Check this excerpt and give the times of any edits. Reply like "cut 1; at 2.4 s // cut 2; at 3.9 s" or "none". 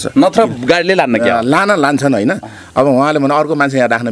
none